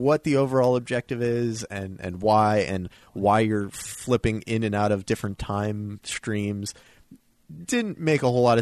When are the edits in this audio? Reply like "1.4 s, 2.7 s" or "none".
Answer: none